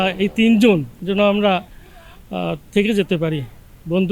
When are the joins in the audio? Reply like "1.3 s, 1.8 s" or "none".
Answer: 1.0 s